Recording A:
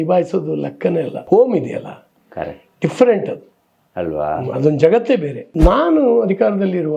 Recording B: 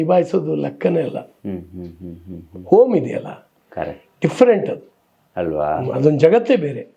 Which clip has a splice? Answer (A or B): A